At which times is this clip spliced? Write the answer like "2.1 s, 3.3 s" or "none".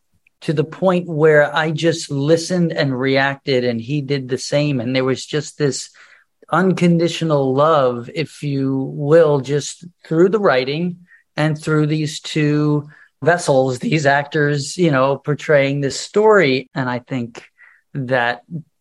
13.2 s, 16.0 s, 16.6 s